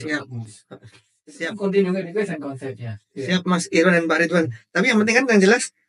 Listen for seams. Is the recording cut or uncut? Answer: uncut